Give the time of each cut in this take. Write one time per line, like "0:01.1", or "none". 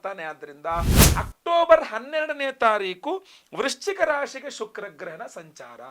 0:01.0